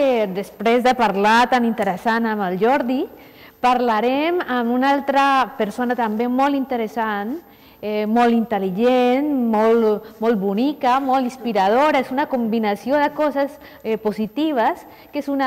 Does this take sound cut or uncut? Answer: uncut